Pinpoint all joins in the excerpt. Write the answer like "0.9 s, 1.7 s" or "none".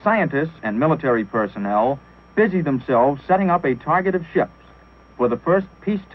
4.6 s